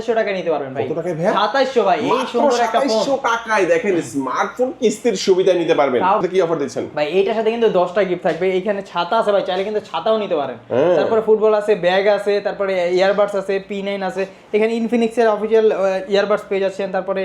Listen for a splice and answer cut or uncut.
cut